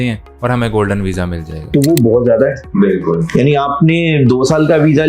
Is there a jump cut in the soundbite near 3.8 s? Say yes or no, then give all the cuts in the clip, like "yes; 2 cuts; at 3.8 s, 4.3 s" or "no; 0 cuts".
no; 1 cut; at 1.7 s